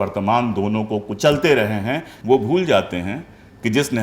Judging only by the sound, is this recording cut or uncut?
cut